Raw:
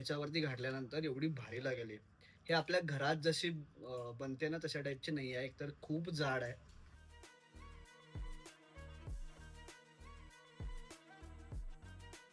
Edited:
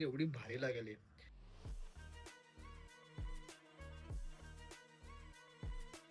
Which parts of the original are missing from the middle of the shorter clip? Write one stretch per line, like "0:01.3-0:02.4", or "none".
0:02.5-0:06.4